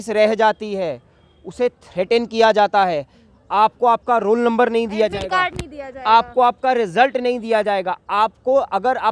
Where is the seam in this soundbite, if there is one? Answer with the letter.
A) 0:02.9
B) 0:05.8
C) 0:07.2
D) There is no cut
D